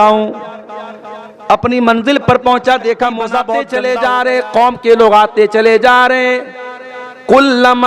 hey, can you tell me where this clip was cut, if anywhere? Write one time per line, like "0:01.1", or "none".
0:03.7